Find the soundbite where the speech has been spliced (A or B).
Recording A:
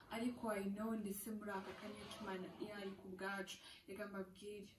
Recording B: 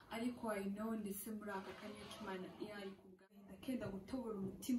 B